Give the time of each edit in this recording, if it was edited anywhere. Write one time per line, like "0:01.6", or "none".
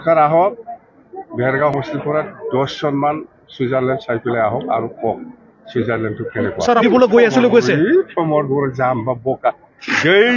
0:01.7
0:06.8

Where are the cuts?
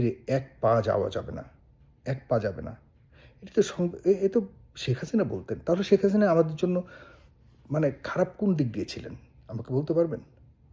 none

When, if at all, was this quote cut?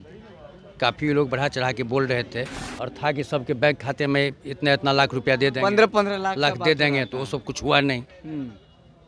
0:02.6

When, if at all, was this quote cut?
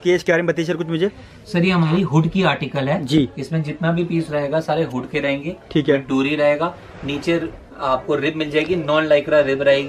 none

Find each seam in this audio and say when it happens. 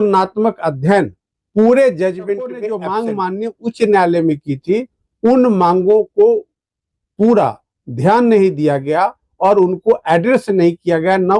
0:02.7

